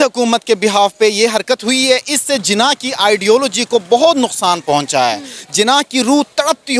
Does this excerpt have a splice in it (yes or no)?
no